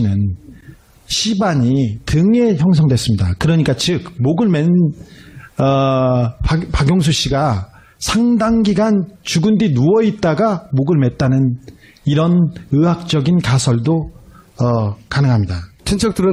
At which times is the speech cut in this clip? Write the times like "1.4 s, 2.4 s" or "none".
none